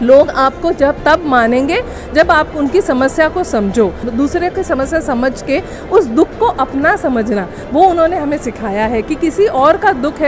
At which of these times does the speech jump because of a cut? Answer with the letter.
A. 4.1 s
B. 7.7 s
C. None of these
A